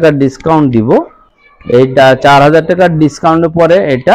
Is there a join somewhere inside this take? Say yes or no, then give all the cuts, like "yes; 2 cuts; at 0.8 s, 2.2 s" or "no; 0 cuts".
no; 0 cuts